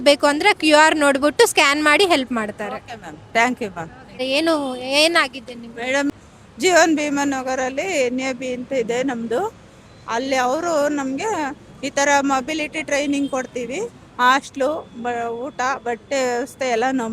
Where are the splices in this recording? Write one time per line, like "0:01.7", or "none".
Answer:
0:04.2
0:06.1